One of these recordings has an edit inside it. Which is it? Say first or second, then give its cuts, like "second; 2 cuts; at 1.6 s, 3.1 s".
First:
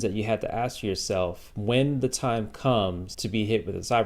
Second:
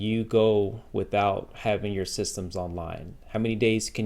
first; 2 cuts; at 1.5 s, 3.1 s